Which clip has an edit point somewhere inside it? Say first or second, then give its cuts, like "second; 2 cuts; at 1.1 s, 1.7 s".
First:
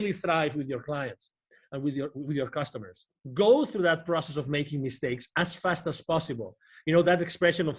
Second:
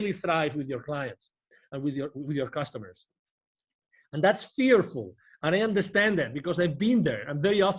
first; 1 cut; at 3.2 s